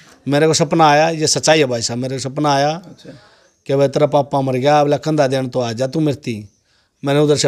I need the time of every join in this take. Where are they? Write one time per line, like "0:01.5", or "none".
none